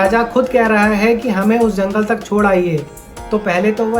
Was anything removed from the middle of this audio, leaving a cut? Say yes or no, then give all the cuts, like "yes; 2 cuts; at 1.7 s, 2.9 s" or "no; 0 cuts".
no; 0 cuts